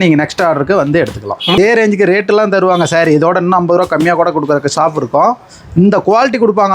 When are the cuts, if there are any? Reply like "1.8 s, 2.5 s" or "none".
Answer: 1.6 s